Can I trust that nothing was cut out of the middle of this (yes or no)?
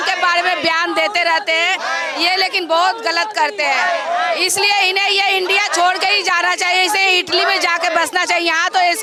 yes